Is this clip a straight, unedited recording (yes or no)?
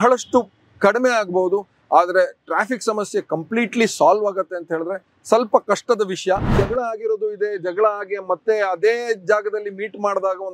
no